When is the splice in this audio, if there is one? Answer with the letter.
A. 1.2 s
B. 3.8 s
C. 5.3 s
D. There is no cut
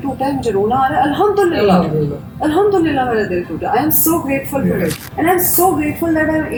D